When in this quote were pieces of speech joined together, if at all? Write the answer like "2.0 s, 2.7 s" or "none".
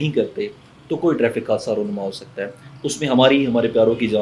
none